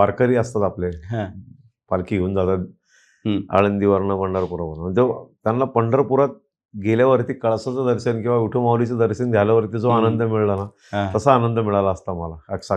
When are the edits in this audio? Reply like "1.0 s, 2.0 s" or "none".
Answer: none